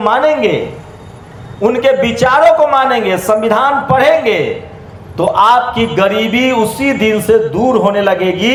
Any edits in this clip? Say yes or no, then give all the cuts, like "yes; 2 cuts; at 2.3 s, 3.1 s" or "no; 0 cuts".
no; 0 cuts